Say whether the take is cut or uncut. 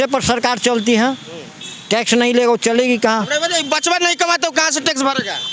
uncut